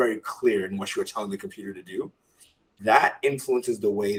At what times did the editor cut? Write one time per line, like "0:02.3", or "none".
none